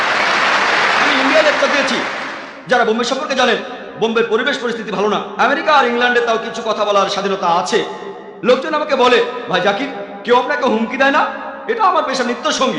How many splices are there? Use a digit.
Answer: 0